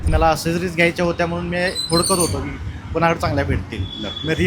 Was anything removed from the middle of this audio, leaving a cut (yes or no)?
no